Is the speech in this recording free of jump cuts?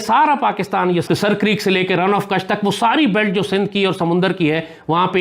no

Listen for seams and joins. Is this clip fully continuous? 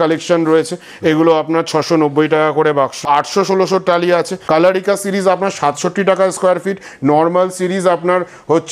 no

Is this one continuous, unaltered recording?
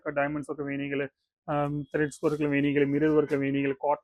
yes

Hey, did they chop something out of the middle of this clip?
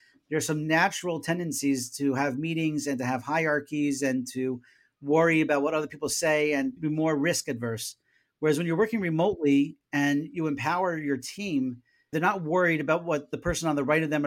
yes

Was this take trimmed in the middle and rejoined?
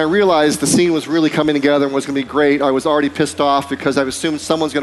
no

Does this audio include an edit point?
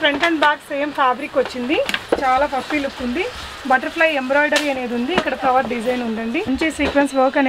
yes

